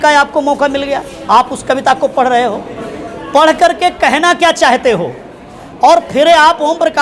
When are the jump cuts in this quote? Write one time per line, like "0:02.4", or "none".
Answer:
none